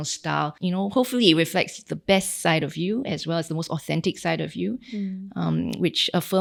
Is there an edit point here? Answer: no; 0 cuts

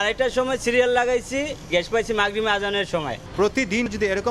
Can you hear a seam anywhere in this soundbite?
yes; 1 cut; at 3.2 s

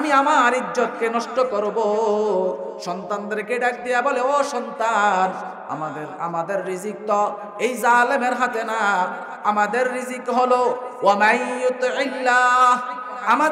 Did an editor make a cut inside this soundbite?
no; 0 cuts

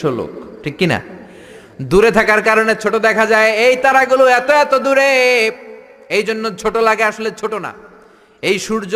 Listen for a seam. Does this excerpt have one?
no; 0 cuts

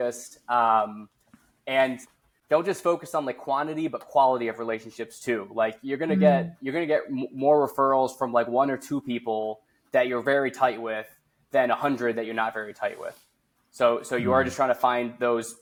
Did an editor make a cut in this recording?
no; 0 cuts

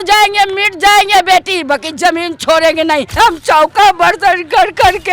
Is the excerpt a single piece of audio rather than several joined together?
no; 1 cut; at 3.1 s

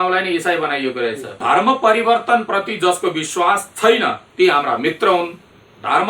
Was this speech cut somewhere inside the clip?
yes; 1 cut; at 1.3 s

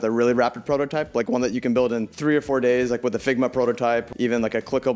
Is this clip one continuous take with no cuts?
no; 2 cuts; at 2.1 s, 4.1 s

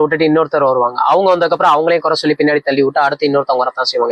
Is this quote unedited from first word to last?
yes; 0 cuts

